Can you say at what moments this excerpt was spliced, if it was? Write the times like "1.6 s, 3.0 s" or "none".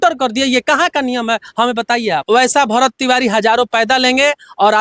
2.2 s